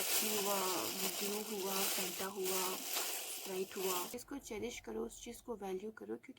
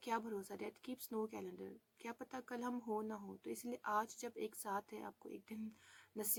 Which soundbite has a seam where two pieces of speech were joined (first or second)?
first